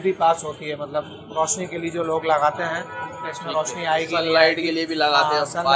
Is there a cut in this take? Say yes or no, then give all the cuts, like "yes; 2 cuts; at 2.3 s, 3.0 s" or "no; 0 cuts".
no; 0 cuts